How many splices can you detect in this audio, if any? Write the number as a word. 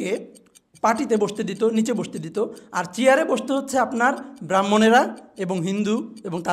zero